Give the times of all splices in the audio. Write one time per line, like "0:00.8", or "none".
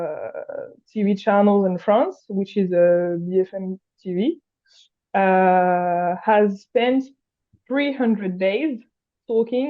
none